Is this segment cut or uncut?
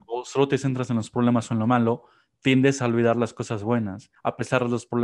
cut